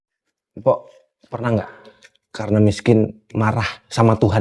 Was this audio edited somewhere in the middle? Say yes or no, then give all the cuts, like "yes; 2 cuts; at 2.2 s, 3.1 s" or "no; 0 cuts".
no; 0 cuts